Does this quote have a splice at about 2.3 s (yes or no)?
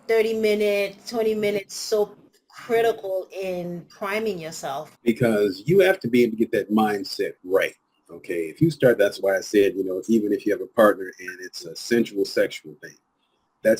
no